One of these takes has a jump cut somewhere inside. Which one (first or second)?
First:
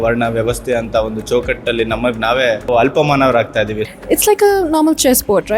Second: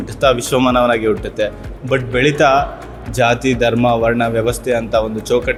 first